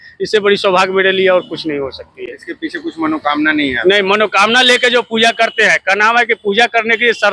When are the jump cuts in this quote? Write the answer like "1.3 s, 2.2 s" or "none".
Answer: none